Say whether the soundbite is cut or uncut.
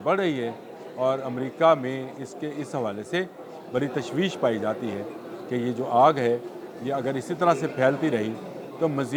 uncut